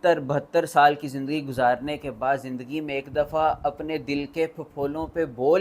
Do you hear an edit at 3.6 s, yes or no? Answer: yes